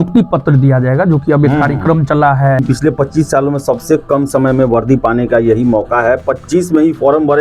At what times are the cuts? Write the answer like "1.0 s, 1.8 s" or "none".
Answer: 2.6 s

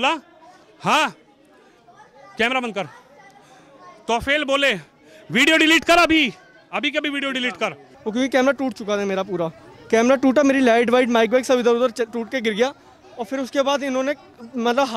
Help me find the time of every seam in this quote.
7.9 s

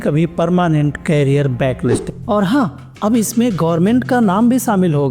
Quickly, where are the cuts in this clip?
2.1 s

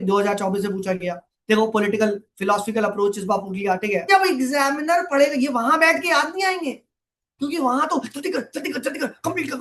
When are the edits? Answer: 4.1 s

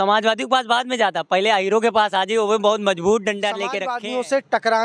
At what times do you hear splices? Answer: 3.9 s

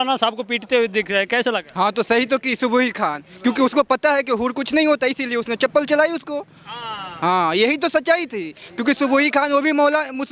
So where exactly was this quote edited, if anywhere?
none

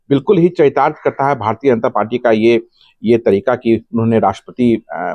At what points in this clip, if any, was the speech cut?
none

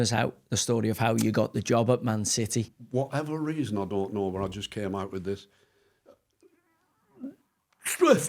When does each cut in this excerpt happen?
2.8 s

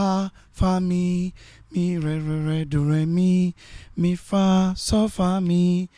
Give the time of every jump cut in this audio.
none

